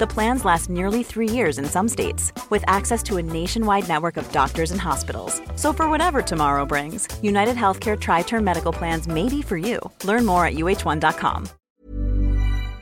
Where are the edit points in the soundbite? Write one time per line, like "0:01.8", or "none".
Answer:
0:11.5